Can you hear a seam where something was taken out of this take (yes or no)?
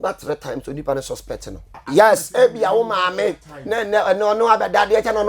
yes